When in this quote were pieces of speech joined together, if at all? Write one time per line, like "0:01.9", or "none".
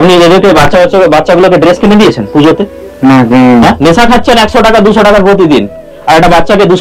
none